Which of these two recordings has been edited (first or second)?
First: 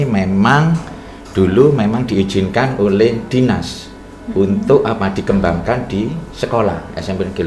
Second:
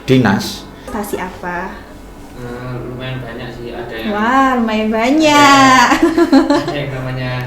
second